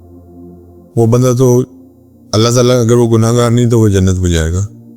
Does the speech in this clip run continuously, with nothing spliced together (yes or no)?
no